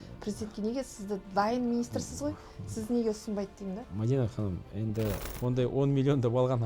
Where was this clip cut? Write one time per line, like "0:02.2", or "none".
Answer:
0:05.3